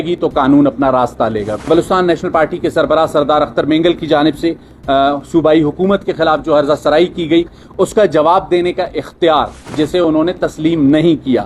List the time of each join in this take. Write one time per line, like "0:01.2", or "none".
0:01.7
0:09.6